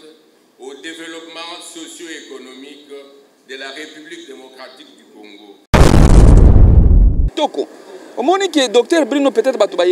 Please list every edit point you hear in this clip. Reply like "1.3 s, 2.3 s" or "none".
5.6 s, 7.3 s